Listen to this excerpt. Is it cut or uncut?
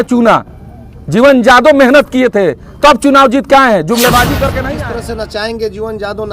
cut